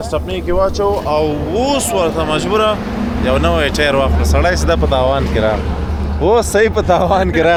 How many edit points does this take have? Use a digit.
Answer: 0